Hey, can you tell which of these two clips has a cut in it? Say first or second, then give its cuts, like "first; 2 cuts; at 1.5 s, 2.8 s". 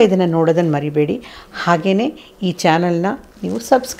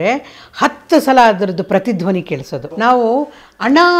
second; 1 cut; at 2.6 s